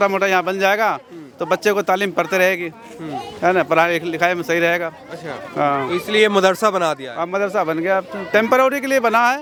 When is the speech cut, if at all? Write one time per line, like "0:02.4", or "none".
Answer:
none